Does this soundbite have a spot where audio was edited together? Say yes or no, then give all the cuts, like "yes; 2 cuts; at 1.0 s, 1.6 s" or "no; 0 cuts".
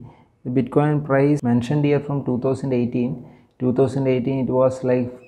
yes; 1 cut; at 1.4 s